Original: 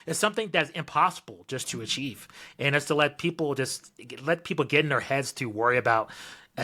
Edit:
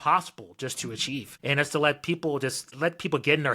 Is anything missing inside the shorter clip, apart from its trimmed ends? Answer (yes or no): yes